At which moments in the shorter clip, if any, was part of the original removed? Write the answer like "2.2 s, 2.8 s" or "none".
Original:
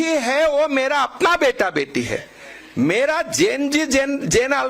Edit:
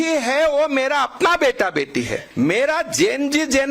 2.2 s